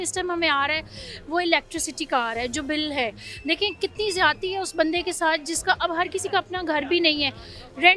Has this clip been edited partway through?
no; 0 cuts

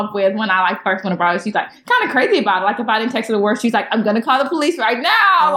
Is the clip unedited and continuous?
no; 1 cut; at 1.7 s

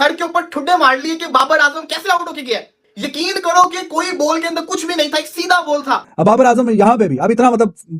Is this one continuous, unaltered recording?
no; 1 cut; at 6.1 s

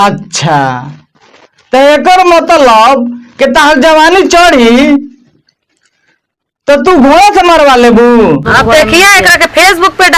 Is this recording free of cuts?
no; 1 cut; at 8.5 s

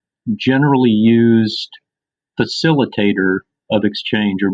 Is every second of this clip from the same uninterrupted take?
yes; 0 cuts

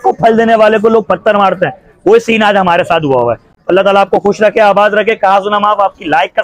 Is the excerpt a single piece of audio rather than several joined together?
yes; 0 cuts

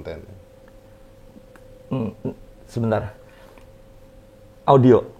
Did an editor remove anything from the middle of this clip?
no; 0 cuts

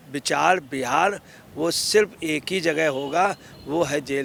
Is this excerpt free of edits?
yes; 0 cuts

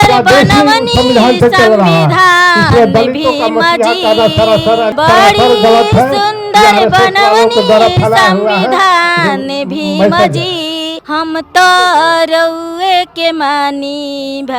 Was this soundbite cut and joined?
no; 0 cuts

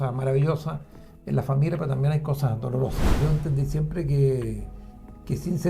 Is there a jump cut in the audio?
yes; 1 cut; at 3.1 s

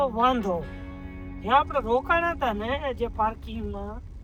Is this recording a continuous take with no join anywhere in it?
yes; 0 cuts

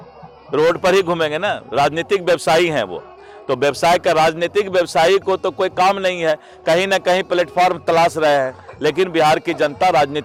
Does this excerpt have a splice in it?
no; 0 cuts

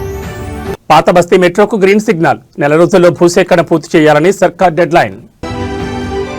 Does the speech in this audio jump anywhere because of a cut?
yes; 1 cut; at 5.4 s

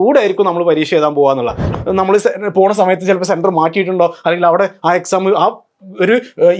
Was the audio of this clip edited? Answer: yes; 1 cut; at 1.7 s

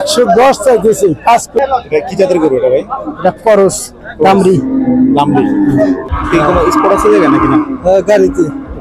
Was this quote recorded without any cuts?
no; 2 cuts; at 1.6 s, 6.1 s

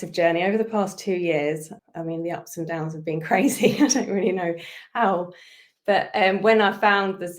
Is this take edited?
yes; 1 cut; at 1.7 s

